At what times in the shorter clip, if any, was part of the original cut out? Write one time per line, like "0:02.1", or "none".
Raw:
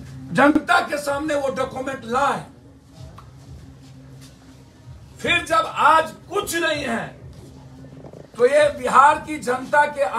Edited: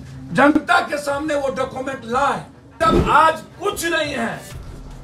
0:02.7